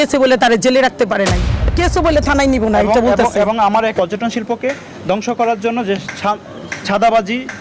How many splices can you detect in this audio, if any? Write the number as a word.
two